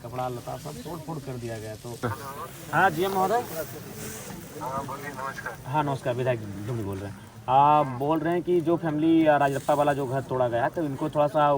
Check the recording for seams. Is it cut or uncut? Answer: cut